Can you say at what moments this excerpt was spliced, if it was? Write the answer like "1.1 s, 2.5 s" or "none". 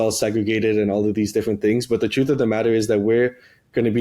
none